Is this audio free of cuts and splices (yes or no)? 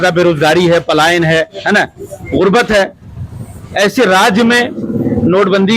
yes